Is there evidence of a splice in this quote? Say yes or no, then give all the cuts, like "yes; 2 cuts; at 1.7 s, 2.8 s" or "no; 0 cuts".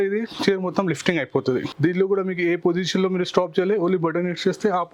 no; 0 cuts